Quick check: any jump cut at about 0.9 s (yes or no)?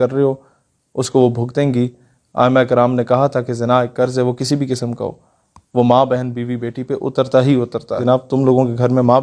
no